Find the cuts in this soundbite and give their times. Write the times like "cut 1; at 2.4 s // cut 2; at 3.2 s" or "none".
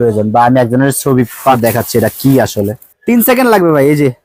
cut 1; at 1.6 s // cut 2; at 2.9 s